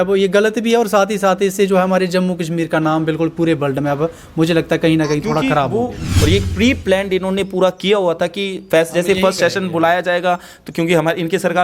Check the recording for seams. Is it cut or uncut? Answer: cut